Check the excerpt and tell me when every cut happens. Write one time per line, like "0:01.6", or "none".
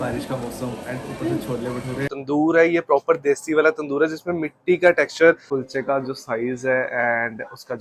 0:02.1
0:05.4